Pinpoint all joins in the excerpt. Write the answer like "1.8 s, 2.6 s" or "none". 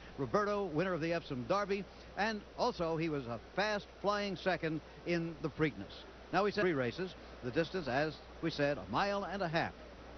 none